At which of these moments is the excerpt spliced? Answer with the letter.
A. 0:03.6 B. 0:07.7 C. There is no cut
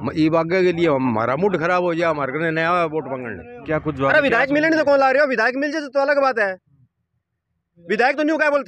A